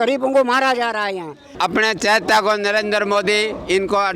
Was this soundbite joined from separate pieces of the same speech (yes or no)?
yes